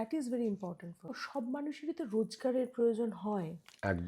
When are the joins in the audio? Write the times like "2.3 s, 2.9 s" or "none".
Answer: 1.2 s